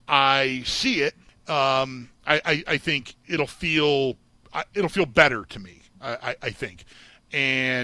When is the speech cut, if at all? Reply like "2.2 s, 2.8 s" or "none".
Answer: 1.3 s, 3.1 s, 6.9 s